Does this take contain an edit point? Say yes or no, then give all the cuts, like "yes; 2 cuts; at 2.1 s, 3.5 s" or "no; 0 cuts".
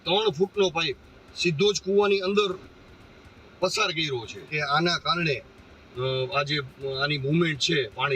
yes; 1 cut; at 4.5 s